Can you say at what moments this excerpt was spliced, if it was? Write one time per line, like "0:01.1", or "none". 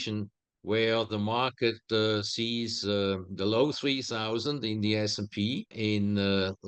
0:05.7

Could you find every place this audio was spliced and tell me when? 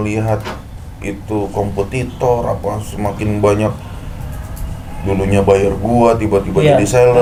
none

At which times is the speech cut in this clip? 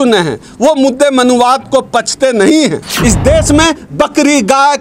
0:02.9

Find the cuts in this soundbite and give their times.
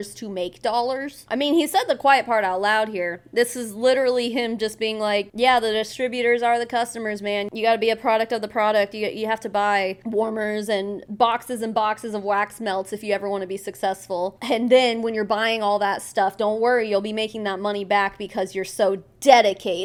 none

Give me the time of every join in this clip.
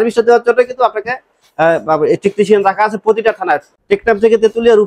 none

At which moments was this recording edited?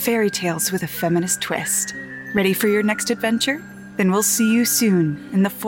0:01.8
0:03.8

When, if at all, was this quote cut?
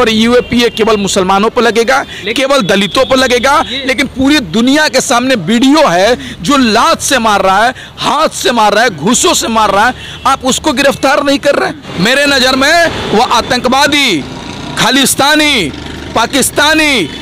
0:03.7
0:11.8

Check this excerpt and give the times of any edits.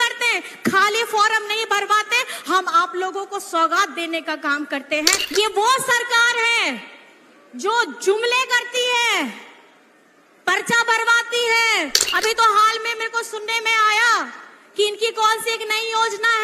0:05.2

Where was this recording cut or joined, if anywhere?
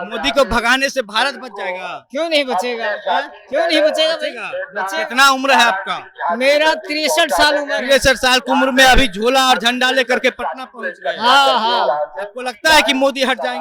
none

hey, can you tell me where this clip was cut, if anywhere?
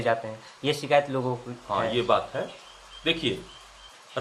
none

